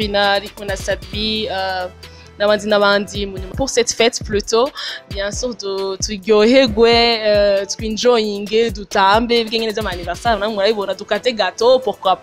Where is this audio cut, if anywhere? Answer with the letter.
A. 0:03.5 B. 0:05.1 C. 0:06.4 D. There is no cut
A